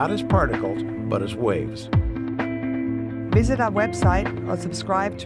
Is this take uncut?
no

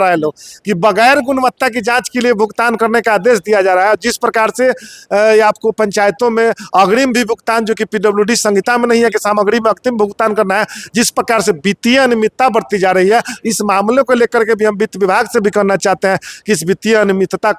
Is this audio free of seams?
yes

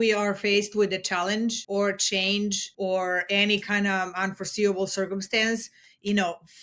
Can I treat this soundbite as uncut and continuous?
no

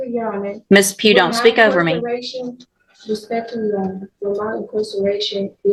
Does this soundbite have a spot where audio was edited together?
no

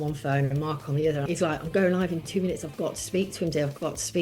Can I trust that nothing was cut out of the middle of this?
no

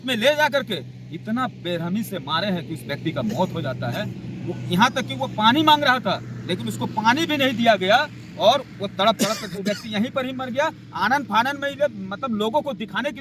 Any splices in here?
no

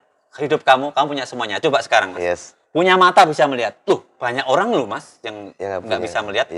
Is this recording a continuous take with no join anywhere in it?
yes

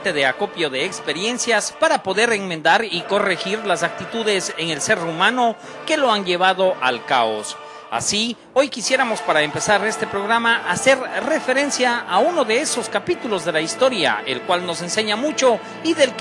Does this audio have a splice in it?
yes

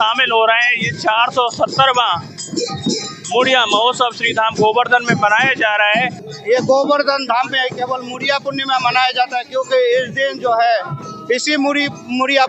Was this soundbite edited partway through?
yes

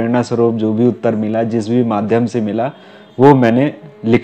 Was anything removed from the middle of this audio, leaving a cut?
no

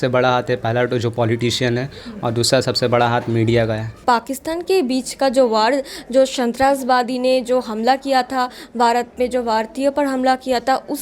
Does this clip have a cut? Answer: yes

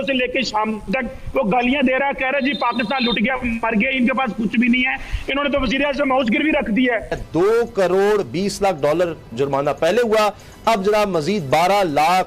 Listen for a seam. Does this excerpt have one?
yes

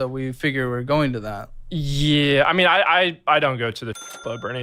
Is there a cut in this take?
yes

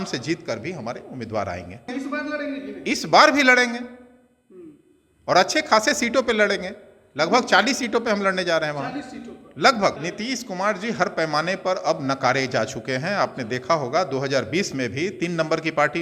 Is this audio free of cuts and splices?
no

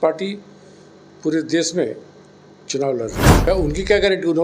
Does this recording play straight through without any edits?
no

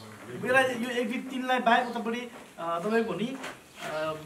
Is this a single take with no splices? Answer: yes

